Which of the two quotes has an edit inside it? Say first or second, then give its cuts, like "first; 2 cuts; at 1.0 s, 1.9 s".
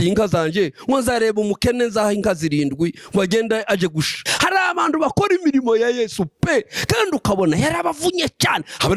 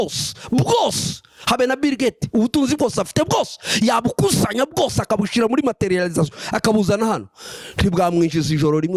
first; 1 cut; at 4.2 s